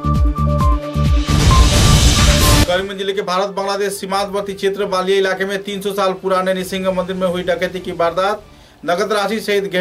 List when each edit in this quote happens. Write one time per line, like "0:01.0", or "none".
0:02.6